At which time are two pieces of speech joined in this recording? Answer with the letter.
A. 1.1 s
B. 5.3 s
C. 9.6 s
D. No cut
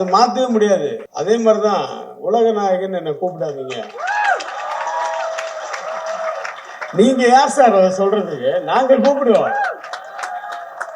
A